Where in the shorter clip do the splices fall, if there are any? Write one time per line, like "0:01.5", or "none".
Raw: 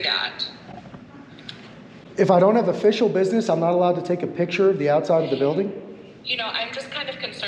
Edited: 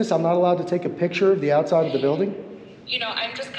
none